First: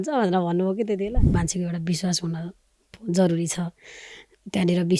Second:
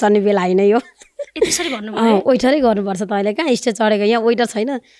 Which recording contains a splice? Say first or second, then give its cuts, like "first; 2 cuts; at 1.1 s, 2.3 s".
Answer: first; 1 cut; at 1.3 s